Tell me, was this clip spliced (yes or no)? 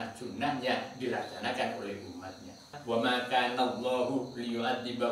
yes